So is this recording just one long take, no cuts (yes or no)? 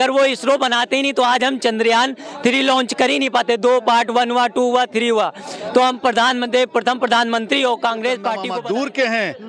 no